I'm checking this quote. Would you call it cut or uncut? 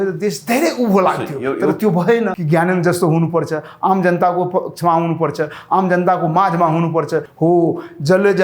cut